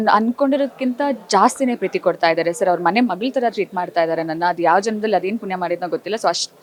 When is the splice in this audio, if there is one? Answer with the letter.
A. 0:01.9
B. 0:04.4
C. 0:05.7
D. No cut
D